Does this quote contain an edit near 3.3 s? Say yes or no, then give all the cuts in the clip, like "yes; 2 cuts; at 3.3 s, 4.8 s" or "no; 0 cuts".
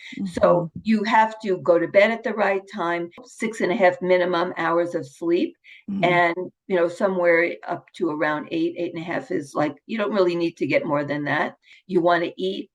yes; 2 cuts; at 3.3 s, 11.7 s